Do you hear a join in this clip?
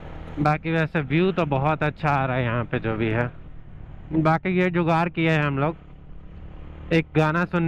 no; 0 cuts

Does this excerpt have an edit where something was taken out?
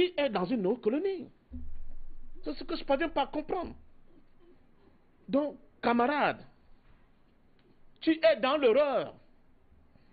no; 0 cuts

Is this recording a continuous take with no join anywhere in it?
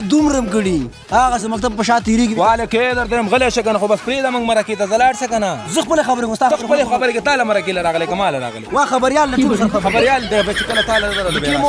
yes; 0 cuts

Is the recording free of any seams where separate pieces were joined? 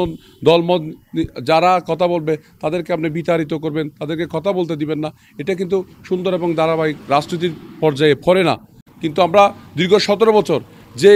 yes; 0 cuts

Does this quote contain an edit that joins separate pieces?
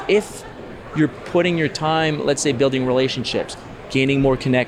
no; 0 cuts

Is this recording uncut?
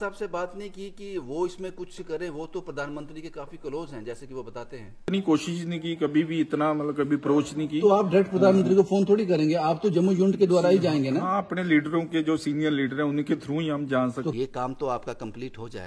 no; 2 cuts; at 5.0 s, 14.3 s

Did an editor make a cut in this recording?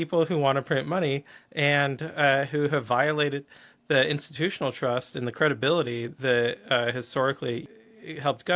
yes; 1 cut; at 7.7 s

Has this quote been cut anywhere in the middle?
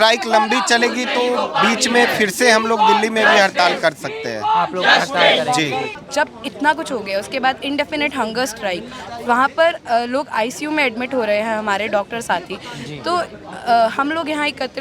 yes; 1 cut; at 5.8 s

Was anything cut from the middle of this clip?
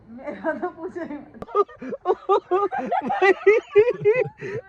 yes; 1 cut; at 1.4 s

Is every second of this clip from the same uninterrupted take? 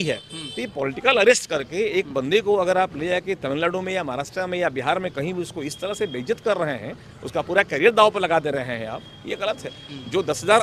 yes; 0 cuts

